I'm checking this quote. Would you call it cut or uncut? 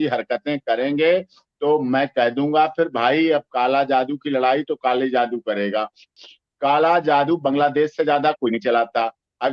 cut